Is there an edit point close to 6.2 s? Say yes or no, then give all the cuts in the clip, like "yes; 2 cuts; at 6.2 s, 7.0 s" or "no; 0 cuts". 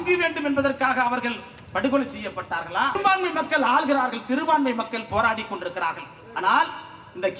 no; 1 cut; at 3.0 s